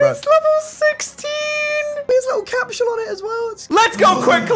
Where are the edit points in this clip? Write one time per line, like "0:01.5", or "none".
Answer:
0:03.6